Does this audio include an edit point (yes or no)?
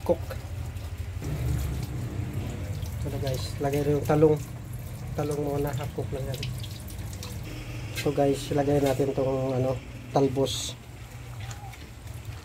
no